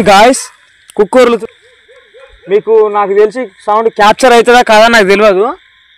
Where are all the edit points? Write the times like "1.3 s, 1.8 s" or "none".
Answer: 1.4 s